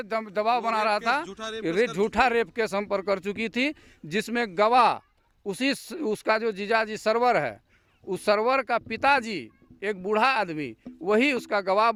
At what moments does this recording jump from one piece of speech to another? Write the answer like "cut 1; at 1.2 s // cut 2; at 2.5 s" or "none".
none